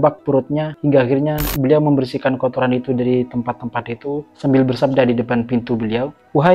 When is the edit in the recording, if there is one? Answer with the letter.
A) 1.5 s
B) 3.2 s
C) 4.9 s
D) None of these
A